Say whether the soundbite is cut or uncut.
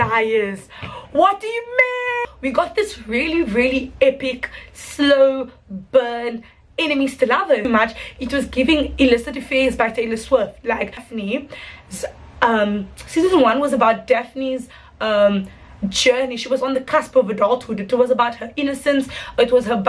cut